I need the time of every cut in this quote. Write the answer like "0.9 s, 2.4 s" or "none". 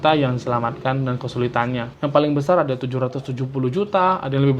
2.0 s